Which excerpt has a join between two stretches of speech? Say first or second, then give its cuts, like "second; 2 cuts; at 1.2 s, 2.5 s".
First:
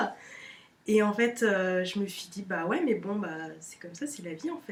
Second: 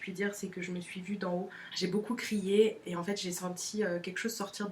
second; 2 cuts; at 1.6 s, 2.8 s